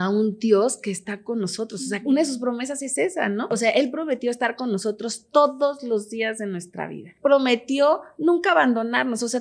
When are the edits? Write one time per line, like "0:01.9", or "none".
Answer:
0:02.1
0:03.5
0:07.1